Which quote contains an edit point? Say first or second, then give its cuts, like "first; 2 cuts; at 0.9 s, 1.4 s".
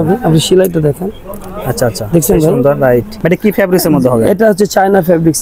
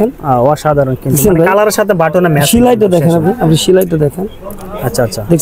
first; 1 cut; at 3.2 s